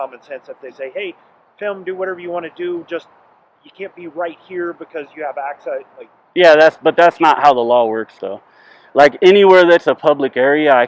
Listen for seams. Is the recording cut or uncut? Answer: uncut